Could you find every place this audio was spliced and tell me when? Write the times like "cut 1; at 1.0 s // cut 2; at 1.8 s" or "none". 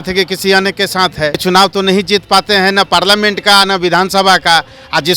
cut 1; at 1.4 s